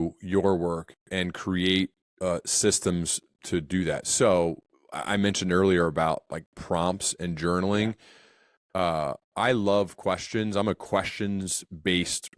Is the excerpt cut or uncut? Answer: uncut